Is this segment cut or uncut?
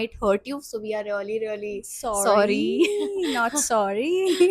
uncut